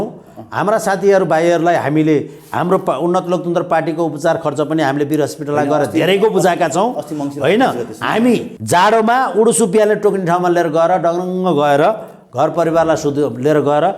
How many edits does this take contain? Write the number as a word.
one